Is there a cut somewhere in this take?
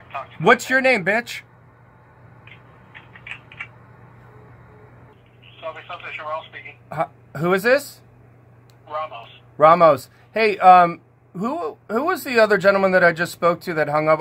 yes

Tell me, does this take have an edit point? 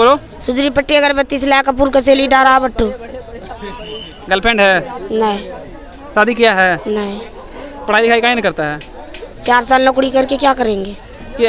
no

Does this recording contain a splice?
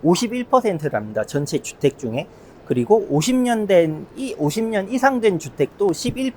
no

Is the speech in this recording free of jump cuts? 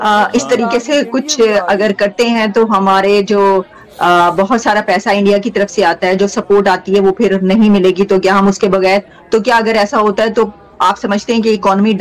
yes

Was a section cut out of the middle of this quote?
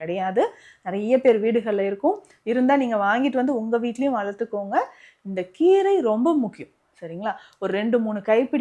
no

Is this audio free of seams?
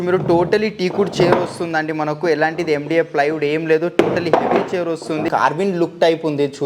no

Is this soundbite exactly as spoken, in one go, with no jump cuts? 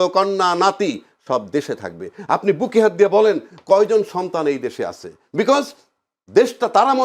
yes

